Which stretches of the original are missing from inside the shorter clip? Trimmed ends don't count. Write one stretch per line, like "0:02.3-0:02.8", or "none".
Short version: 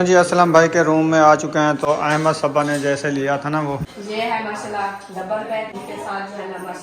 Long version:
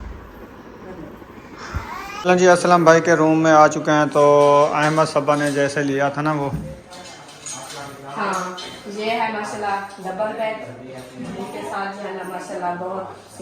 0:04.2-0:04.6
0:06.6-0:08.8
0:10.6-0:11.4